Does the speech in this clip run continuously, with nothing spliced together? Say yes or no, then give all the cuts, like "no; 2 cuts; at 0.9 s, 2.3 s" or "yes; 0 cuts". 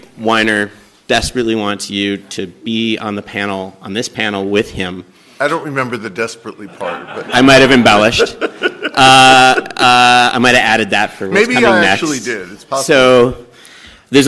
yes; 0 cuts